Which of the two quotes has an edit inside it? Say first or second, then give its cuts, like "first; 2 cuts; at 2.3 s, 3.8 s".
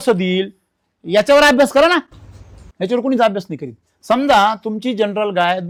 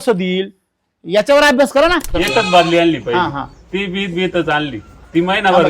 second; 1 cut; at 2.1 s